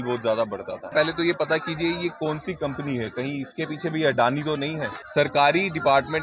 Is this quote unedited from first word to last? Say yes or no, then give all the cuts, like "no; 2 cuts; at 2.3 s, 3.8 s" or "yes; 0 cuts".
no; 2 cuts; at 0.9 s, 5.0 s